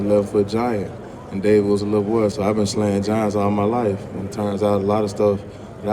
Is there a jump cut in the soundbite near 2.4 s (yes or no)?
yes